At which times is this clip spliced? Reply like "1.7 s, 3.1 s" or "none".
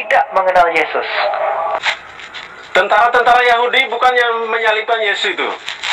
1.8 s